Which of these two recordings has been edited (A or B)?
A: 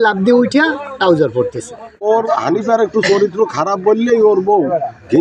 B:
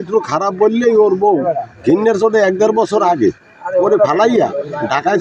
A